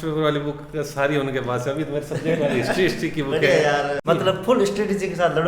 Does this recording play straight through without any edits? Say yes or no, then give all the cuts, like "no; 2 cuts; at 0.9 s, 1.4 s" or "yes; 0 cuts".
no; 1 cut; at 4.0 s